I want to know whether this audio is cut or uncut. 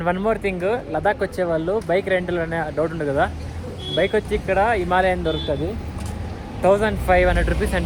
uncut